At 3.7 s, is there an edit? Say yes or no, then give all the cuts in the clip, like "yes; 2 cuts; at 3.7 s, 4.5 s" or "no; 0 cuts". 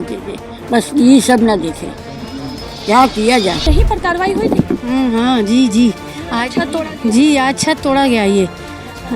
yes; 1 cut; at 3.7 s